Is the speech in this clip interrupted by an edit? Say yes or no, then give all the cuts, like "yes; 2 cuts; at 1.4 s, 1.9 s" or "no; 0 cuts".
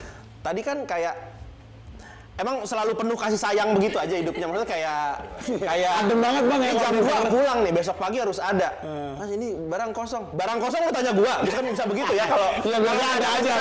no; 0 cuts